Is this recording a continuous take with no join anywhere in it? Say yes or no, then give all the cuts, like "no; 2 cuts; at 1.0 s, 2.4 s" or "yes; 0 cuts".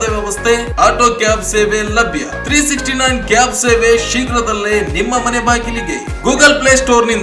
yes; 0 cuts